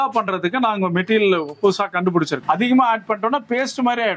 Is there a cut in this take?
yes; 1 cut; at 2.4 s

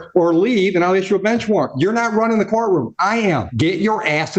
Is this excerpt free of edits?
no; 1 cut; at 3.5 s

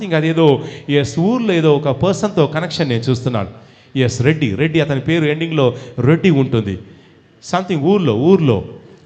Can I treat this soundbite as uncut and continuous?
yes; 0 cuts

